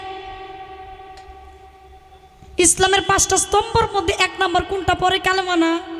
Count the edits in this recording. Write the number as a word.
zero